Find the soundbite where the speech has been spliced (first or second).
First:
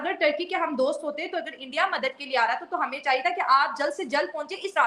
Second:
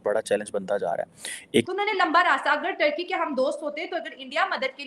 second